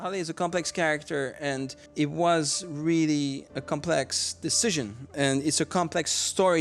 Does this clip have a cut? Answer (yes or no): yes